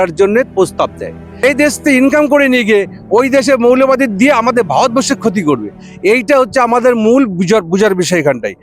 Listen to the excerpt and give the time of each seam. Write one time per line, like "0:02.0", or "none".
0:01.4